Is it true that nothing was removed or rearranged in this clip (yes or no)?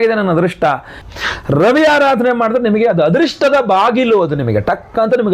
no